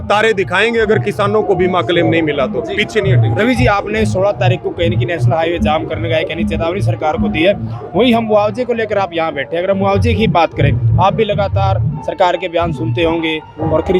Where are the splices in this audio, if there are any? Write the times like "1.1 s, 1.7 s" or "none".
none